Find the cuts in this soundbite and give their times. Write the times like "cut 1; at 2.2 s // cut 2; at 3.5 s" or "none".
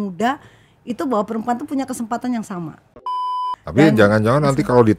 cut 1; at 3.1 s